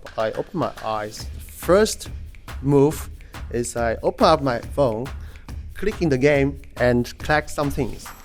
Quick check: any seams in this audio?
no; 0 cuts

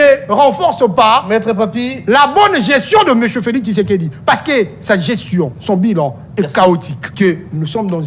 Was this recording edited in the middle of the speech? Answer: yes; 1 cut; at 7.0 s

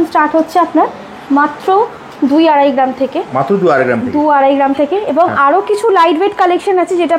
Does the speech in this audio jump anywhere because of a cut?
no; 0 cuts

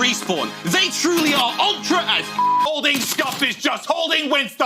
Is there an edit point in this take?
yes; 1 cut; at 2.7 s

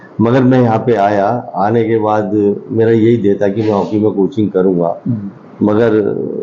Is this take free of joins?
yes; 0 cuts

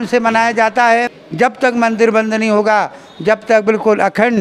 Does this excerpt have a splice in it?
yes; 1 cut; at 1.2 s

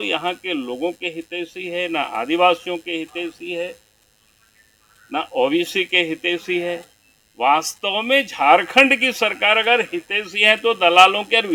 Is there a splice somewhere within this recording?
no; 0 cuts

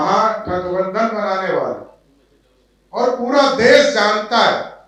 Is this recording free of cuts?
yes; 0 cuts

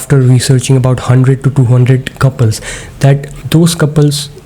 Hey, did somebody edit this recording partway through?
yes; 1 cut; at 3.3 s

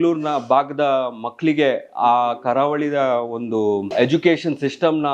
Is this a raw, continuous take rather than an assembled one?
no; 1 cut; at 3.9 s

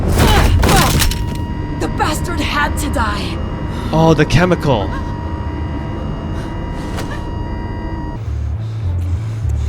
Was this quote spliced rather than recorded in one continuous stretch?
yes; 1 cut; at 8.2 s

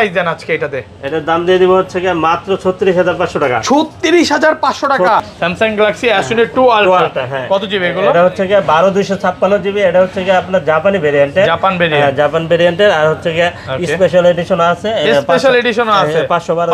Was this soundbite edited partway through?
yes; 1 cut; at 5.2 s

